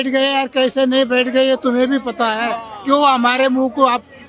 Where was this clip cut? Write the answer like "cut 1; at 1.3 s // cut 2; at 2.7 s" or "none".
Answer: none